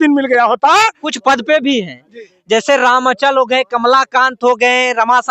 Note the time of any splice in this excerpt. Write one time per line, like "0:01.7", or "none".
0:01.1